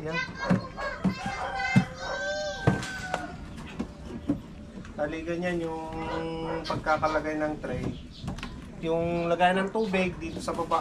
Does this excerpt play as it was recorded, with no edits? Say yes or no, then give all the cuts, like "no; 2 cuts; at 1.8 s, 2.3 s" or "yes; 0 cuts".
yes; 0 cuts